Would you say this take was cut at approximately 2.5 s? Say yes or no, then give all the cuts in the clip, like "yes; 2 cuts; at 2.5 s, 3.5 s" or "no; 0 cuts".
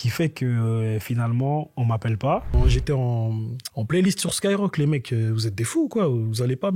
yes; 1 cut; at 2.5 s